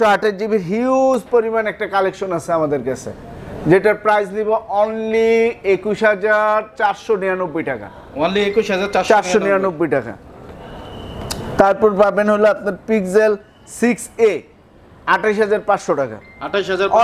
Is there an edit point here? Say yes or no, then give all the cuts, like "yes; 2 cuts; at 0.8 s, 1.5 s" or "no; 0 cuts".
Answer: no; 0 cuts